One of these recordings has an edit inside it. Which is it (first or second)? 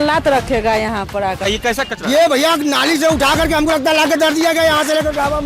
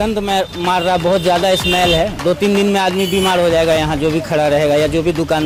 first